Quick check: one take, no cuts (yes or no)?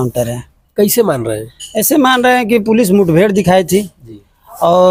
yes